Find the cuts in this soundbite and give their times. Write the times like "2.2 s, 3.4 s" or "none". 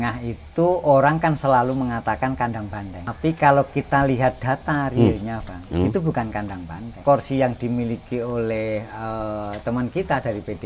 3.0 s, 7.0 s